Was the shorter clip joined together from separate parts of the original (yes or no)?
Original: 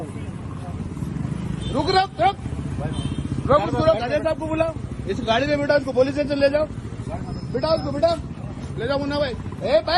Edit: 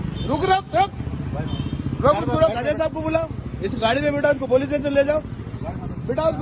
no